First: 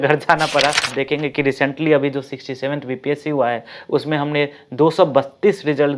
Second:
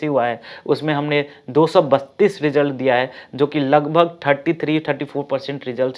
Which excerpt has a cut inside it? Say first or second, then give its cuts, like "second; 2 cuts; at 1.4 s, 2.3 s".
first; 1 cut; at 1.0 s